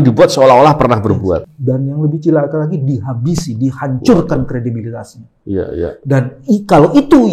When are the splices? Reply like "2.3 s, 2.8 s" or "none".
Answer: 1.5 s